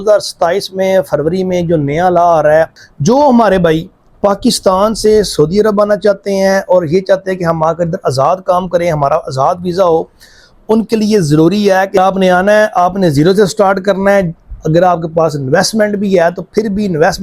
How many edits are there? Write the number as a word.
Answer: two